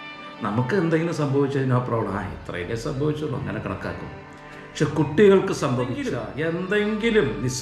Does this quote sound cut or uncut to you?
cut